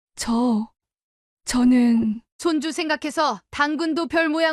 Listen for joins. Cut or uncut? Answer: uncut